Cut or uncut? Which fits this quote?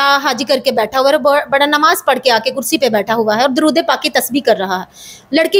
uncut